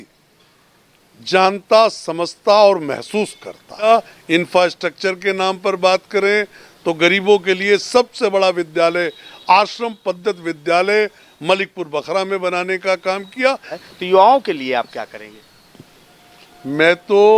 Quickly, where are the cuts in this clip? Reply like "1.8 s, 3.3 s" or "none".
3.8 s, 13.7 s